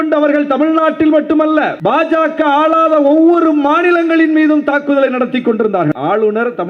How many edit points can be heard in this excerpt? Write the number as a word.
two